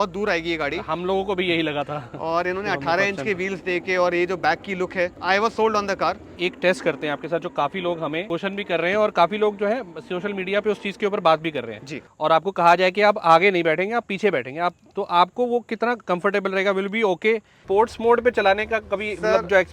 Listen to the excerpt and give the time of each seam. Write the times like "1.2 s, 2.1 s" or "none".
5.2 s, 6.3 s, 8.2 s, 11.7 s, 17.5 s